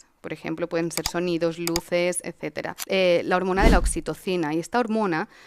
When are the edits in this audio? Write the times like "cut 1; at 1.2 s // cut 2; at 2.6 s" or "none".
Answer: cut 1; at 2.7 s

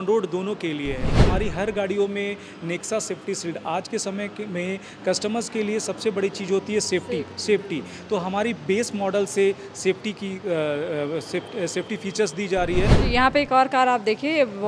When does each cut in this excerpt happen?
cut 1; at 1.1 s // cut 2; at 13.0 s

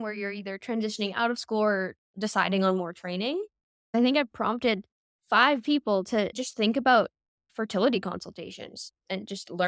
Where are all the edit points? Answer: cut 1; at 3.9 s // cut 2; at 6.4 s

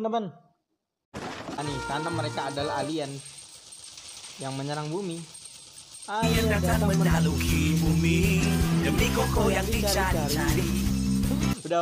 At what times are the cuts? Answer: cut 1; at 1.6 s

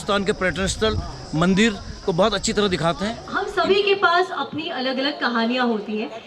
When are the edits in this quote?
cut 1; at 3.3 s

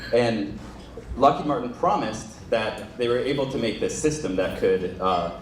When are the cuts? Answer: none

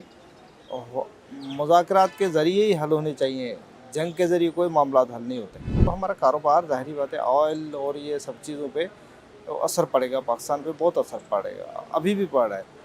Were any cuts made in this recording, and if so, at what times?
cut 1; at 5.8 s

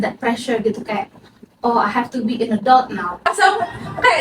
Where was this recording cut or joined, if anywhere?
cut 1; at 3.3 s

